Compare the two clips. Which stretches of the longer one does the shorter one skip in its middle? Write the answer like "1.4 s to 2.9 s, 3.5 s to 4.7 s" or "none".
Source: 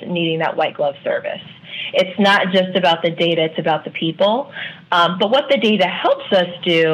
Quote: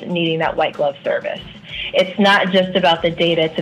none